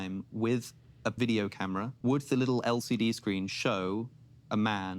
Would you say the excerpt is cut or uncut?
cut